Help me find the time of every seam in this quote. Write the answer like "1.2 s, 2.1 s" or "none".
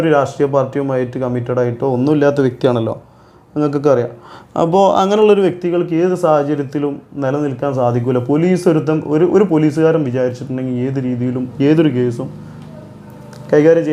none